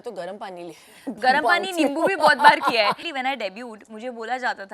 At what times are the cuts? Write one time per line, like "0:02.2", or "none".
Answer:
0:03.0